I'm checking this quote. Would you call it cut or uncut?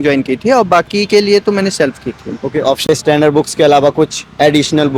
cut